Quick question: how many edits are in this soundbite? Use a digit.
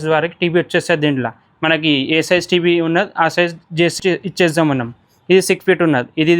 0